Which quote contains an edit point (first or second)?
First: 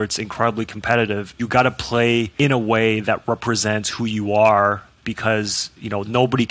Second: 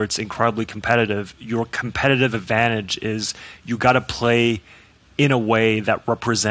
first